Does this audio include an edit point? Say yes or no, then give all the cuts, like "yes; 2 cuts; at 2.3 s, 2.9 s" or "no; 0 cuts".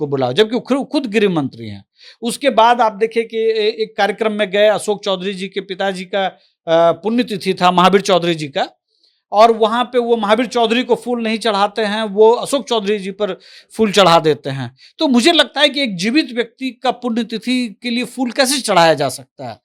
no; 0 cuts